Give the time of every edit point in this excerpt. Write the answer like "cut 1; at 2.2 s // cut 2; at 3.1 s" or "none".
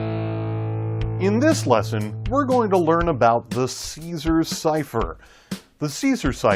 cut 1; at 1.0 s